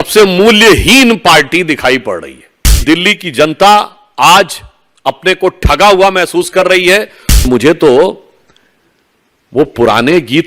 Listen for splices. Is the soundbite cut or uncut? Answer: cut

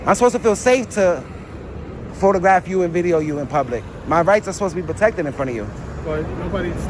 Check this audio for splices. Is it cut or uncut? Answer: uncut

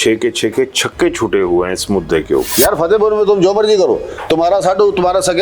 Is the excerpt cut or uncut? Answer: cut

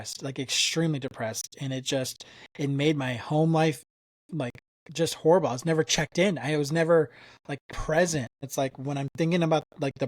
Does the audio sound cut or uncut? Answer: cut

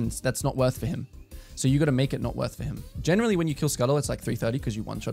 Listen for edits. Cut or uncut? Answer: cut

